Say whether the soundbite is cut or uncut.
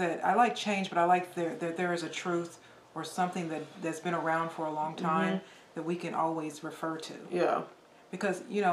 uncut